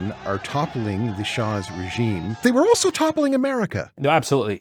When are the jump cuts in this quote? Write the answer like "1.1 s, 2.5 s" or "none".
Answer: none